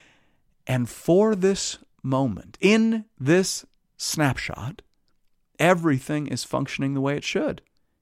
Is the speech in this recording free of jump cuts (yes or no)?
yes